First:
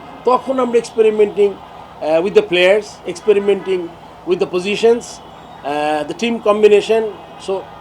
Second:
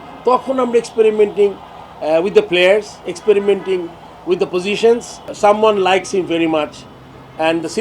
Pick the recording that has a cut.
second; 1 cut; at 5.2 s

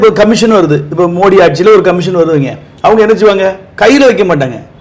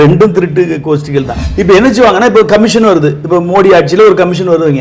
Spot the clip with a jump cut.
second; 1 cut; at 1.4 s

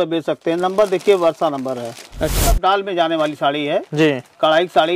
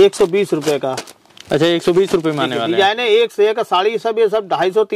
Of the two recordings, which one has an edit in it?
first; 1 cut; at 2.2 s

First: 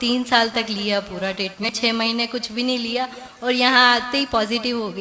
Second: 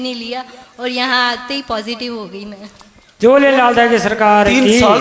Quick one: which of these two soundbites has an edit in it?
first; 1 cut; at 1.7 s

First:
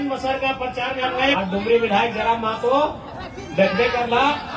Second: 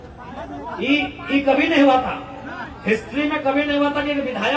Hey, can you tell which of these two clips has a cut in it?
first; 1 cut; at 1.3 s

